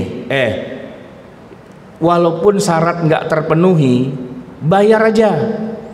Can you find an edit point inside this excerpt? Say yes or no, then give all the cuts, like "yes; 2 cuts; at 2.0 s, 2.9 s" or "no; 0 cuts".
no; 0 cuts